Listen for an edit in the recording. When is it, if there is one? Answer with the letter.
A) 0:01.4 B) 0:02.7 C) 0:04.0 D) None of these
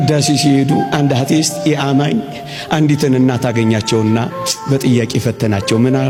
D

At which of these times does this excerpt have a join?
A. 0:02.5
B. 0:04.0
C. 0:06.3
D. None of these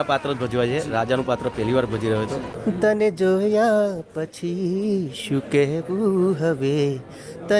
A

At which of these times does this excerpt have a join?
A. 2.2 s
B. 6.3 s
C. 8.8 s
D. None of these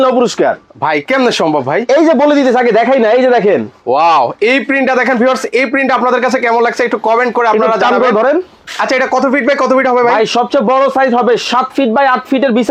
D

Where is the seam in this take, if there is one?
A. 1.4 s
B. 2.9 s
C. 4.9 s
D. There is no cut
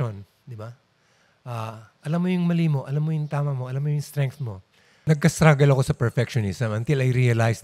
C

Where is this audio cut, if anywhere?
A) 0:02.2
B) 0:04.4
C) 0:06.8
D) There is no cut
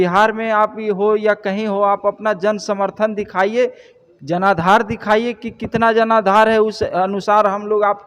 D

